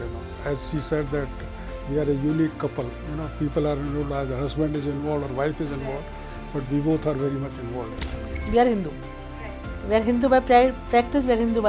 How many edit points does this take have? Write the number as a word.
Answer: one